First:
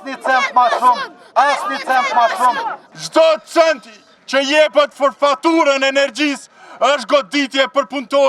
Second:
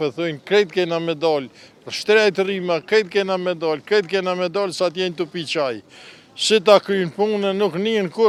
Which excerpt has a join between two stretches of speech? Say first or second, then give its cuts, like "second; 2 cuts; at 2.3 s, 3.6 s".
first; 1 cut; at 3.0 s